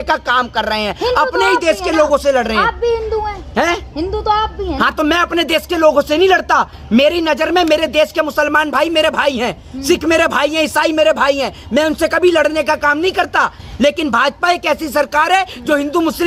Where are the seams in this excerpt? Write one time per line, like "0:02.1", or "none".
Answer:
none